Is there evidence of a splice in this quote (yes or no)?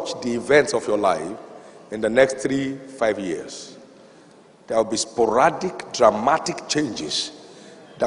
no